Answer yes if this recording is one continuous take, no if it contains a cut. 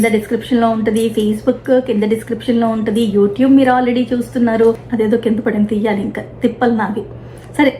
no